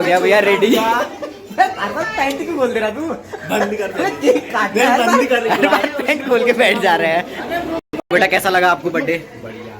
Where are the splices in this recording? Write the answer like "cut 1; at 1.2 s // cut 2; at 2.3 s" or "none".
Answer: cut 1; at 7.9 s